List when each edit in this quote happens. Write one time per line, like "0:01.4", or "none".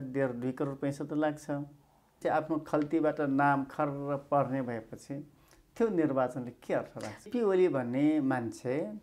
0:02.2
0:07.3